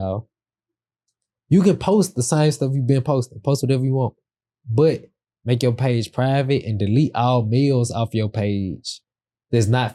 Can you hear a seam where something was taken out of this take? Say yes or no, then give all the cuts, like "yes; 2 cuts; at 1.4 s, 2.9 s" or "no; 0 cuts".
no; 0 cuts